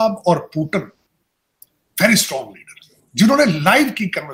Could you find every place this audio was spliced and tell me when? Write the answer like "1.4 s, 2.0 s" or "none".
none